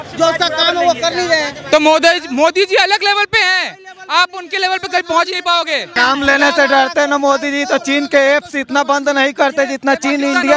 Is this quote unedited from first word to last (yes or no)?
no